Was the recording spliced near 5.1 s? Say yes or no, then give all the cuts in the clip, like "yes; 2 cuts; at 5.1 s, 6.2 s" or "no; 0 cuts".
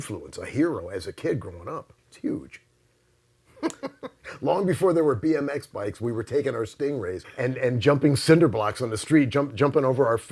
no; 3 cuts; at 0.8 s, 2.0 s, 7.3 s